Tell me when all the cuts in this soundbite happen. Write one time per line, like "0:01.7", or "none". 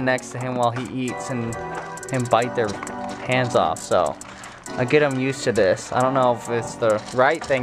none

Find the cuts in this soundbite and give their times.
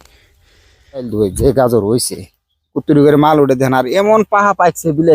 0:01.1

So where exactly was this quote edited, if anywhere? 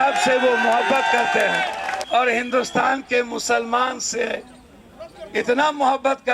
0:02.0

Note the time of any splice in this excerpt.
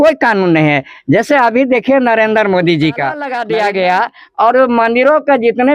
0:03.3

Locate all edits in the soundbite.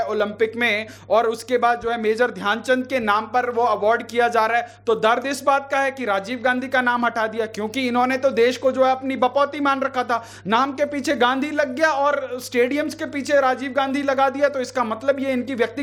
none

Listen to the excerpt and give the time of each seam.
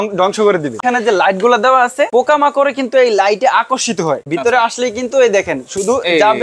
0:00.8
0:02.1
0:04.3

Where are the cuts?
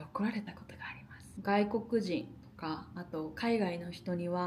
0:01.3

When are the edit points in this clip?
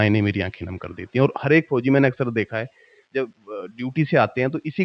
none

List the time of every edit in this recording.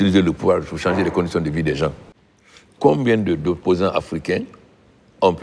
0:02.0

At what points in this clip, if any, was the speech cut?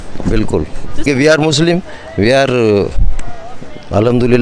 0:01.1

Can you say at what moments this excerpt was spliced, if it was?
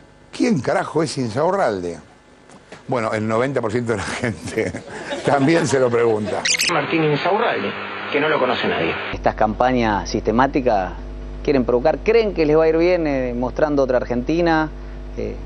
0:09.1

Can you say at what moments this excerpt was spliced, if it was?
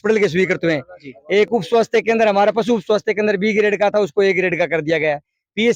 none

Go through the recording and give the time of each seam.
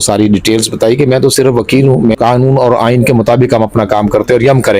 0:02.2

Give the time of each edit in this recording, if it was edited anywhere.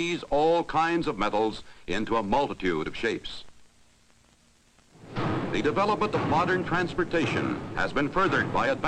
0:07.4

